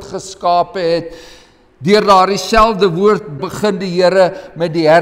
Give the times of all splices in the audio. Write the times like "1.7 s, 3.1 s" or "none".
3.4 s